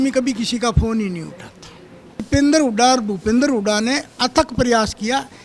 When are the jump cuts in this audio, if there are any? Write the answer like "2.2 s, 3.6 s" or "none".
2.3 s